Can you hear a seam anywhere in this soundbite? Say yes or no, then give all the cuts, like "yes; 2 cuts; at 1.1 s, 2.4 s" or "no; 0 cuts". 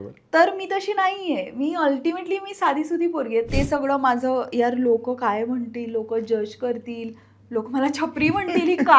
yes; 1 cut; at 3.5 s